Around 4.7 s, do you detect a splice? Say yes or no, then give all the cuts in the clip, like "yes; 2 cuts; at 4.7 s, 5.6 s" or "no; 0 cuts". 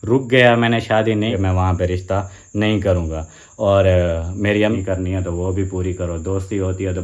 yes; 2 cuts; at 1.3 s, 4.7 s